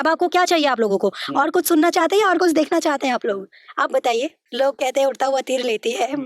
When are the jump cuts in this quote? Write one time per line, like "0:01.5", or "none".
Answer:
0:04.4

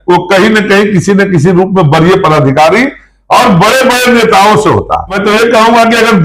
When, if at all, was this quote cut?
0:05.2

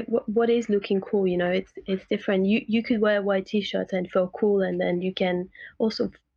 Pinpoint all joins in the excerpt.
none

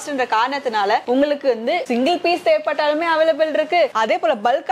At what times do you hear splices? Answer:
none

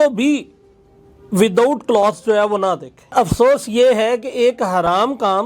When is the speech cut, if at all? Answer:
0:03.1

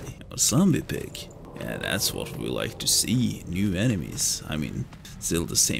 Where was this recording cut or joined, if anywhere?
none

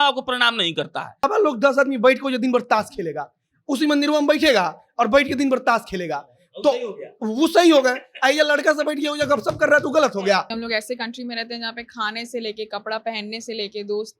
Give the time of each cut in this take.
0:01.3
0:10.5

